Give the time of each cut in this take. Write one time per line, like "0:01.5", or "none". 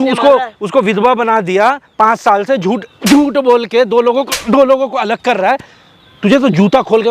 none